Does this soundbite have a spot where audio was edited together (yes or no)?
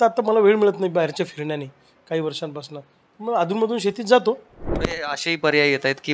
yes